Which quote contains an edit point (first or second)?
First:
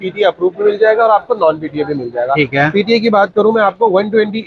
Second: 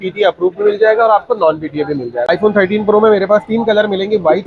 second